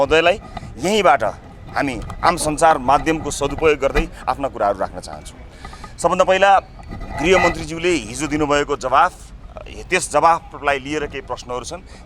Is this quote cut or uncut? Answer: uncut